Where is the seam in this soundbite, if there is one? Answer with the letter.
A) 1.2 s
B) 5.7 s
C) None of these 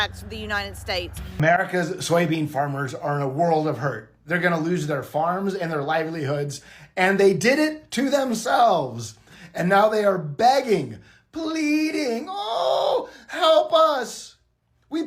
A